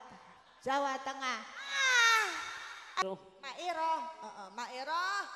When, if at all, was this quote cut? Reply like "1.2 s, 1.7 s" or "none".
3.0 s